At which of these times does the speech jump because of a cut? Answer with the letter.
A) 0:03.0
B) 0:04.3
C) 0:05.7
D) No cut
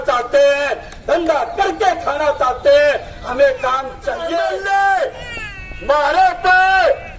B